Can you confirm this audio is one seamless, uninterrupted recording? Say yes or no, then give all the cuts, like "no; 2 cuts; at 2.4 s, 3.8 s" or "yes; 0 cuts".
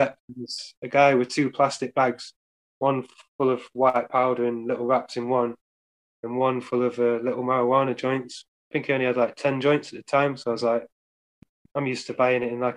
yes; 0 cuts